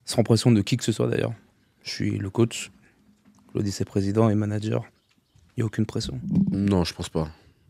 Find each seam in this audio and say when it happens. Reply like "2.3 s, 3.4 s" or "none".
6.4 s